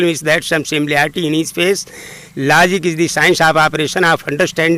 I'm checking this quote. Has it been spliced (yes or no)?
no